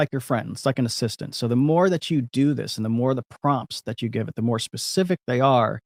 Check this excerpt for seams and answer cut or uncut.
uncut